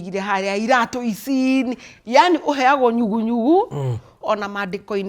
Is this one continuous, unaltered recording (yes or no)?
no